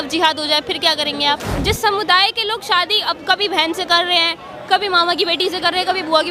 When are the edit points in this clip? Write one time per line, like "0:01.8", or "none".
0:01.6

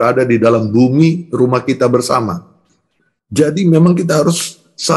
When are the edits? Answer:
none

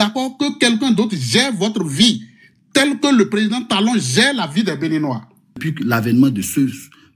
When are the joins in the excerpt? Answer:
0:05.7

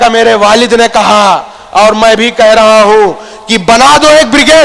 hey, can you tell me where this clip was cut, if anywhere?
none

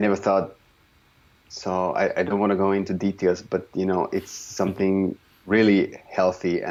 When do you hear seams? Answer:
none

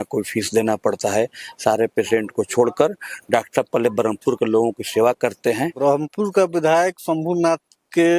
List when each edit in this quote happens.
0:05.7

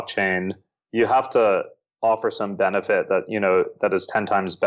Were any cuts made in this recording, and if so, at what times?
none

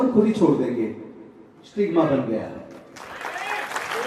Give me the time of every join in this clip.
none

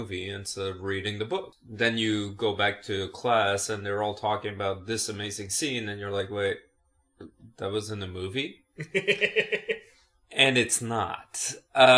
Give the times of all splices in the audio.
0:08.8

